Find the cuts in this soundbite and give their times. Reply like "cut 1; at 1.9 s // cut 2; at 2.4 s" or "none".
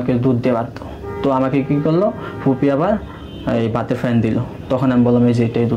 none